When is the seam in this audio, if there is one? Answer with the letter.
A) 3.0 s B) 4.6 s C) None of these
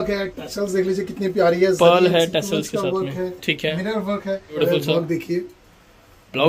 B